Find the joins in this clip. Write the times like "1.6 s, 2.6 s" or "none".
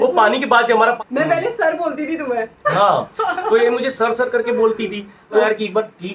1.0 s, 5.4 s